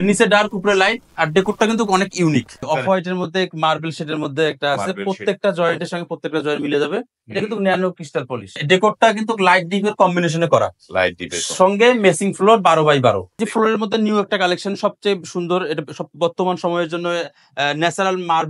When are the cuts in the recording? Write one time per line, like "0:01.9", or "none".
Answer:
0:02.6
0:08.6
0:13.4